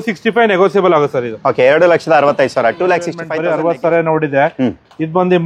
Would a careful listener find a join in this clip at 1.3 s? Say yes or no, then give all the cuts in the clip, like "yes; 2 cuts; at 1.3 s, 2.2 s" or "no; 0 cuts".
no; 1 cut; at 3.2 s